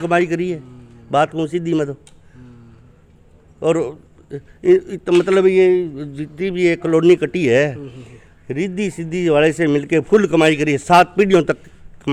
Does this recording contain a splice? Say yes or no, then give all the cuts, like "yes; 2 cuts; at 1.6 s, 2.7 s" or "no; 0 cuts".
no; 0 cuts